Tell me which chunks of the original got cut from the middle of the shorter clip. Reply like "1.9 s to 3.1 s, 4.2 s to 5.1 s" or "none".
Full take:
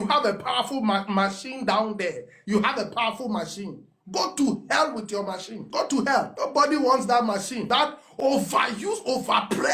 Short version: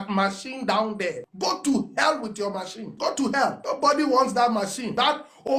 2.3 s to 4.0 s